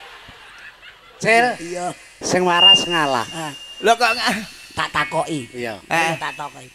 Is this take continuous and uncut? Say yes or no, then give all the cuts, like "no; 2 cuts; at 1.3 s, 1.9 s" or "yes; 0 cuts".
yes; 0 cuts